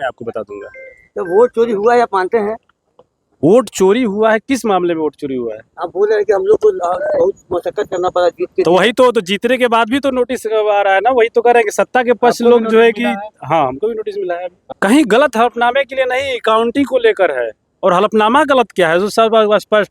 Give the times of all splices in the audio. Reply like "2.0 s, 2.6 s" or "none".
14.6 s

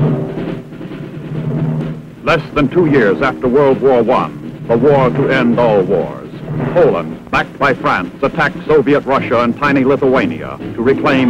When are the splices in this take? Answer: none

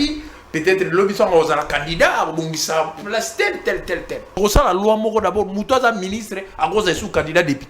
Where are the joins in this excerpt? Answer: 4.3 s

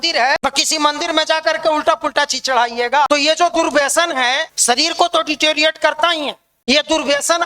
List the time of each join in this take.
3.1 s, 4.5 s, 6.5 s

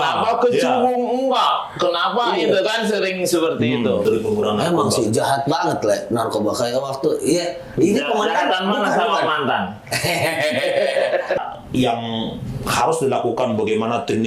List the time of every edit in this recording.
4.0 s, 11.4 s

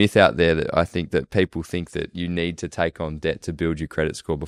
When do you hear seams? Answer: none

